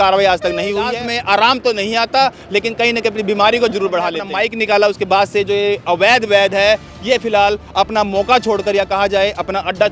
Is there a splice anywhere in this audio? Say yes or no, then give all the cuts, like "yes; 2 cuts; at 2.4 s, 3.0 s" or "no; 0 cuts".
yes; 2 cuts; at 0.9 s, 4.2 s